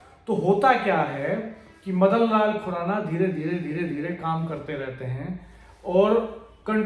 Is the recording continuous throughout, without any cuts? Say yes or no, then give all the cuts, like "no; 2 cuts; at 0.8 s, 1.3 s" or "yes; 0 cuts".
yes; 0 cuts